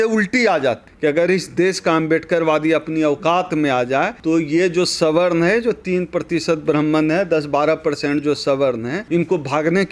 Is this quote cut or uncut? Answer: cut